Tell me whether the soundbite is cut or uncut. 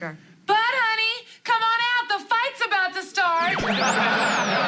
uncut